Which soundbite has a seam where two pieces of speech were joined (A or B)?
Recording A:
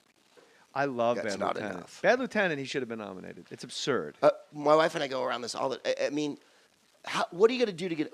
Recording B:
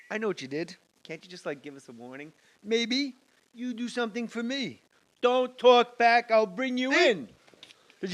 B